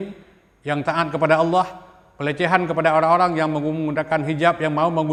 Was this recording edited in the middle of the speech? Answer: no; 0 cuts

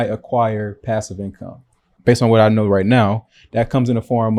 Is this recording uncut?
no; 1 cut; at 1.9 s

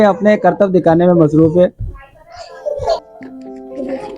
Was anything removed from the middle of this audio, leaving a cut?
yes; 1 cut; at 3.1 s

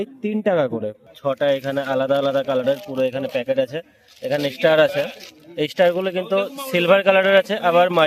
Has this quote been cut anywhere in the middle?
yes; 1 cut; at 1.0 s

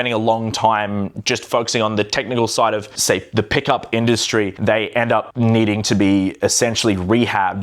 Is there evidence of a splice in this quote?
no; 0 cuts

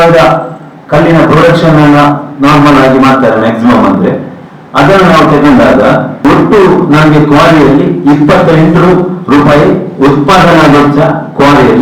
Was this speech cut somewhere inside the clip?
yes; 1 cut; at 6.1 s

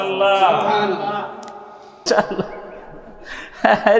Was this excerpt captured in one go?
no; 1 cut; at 2.1 s

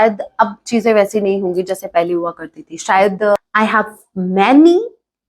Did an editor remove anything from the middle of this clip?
yes; 1 cut; at 3.4 s

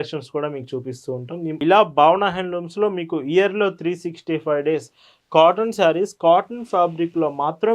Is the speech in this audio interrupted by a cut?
yes; 1 cut; at 1.6 s

